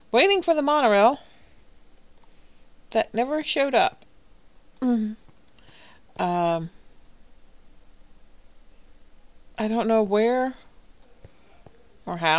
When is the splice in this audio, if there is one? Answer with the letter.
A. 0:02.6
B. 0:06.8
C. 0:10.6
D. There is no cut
C